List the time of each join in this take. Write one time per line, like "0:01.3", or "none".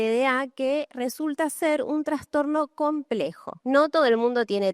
0:03.5

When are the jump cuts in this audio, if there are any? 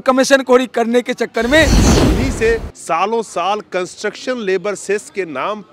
0:01.8

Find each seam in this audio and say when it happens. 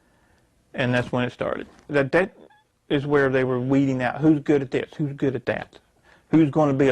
0:01.9

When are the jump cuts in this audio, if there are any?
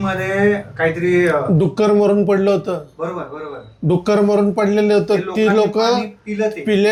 none

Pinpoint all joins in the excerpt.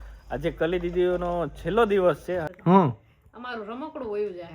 0:02.5

